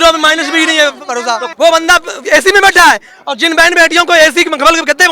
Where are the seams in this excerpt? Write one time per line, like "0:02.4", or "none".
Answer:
0:01.5